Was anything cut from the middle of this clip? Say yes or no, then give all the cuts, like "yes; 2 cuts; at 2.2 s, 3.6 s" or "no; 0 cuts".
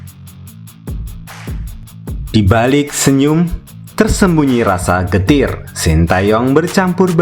yes; 1 cut; at 2.3 s